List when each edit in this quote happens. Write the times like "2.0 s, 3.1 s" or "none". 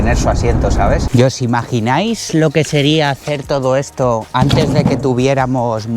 1.1 s

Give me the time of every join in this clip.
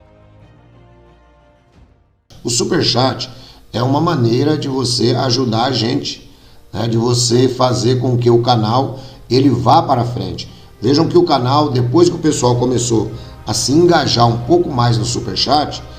2.2 s

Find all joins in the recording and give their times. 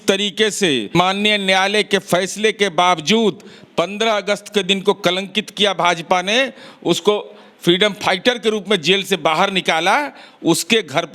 0.9 s

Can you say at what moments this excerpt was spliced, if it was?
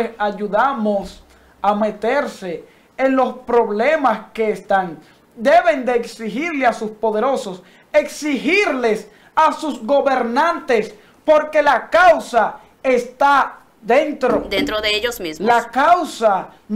none

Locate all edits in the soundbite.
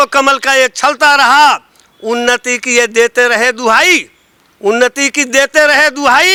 none

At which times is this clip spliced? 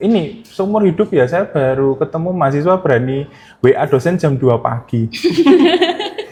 none

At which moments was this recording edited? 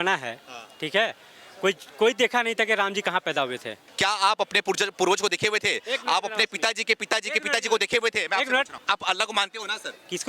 3.7 s, 8.8 s

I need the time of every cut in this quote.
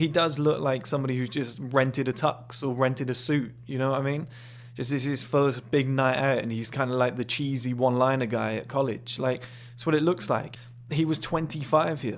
none

